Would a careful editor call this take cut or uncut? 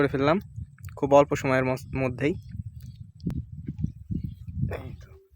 cut